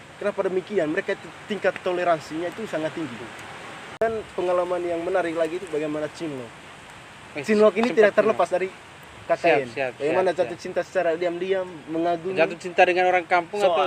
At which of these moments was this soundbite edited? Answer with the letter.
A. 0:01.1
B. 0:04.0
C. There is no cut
B